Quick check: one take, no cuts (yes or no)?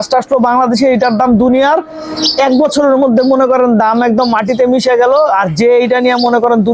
yes